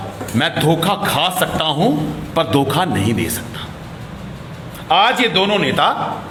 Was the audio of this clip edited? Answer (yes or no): no